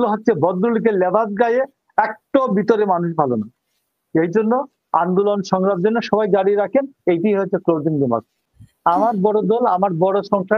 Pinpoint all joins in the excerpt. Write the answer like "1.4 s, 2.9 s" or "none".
8.4 s